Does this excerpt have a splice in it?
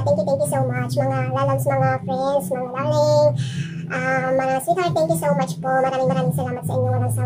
no; 0 cuts

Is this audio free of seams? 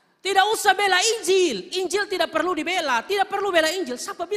yes; 0 cuts

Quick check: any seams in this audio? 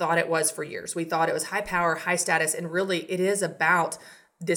no; 0 cuts

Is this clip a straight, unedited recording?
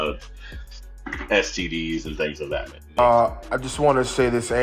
no; 1 cut; at 3.0 s

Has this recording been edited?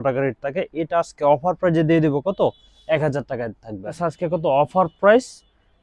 yes; 1 cut; at 3.9 s

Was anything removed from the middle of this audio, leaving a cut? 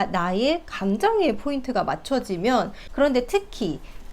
yes; 1 cut; at 2.8 s

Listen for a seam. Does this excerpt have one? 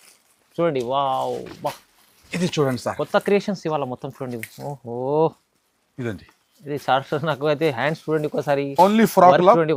no; 0 cuts

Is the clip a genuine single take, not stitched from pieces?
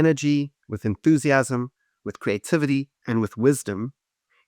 no; 1 cut; at 3.0 s

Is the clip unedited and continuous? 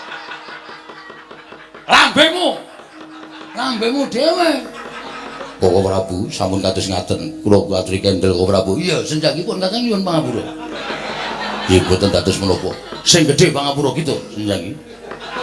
yes; 0 cuts

